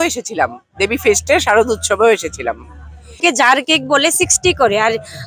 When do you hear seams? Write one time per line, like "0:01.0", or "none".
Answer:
0:03.2